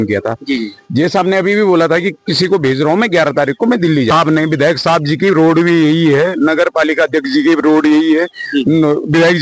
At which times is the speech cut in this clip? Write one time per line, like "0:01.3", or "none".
0:04.1

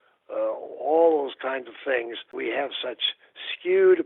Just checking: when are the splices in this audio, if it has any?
0:02.3

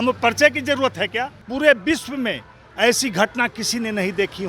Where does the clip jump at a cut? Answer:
0:01.4

